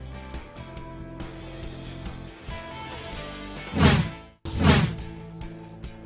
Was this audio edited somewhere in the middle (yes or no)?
yes